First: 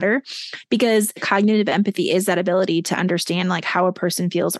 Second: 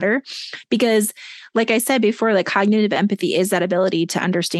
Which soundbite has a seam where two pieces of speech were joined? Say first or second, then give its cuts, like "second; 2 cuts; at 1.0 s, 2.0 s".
first; 1 cut; at 1.2 s